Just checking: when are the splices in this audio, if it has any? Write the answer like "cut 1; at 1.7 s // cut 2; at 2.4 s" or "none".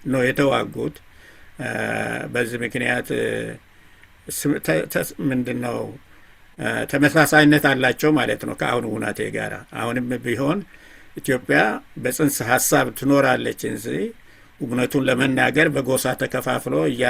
none